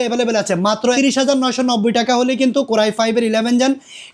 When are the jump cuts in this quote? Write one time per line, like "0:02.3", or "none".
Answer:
0:01.0